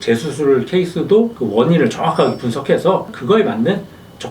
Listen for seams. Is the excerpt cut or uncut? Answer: cut